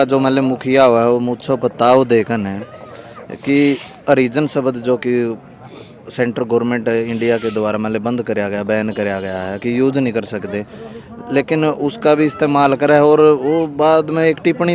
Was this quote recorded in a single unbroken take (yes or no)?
yes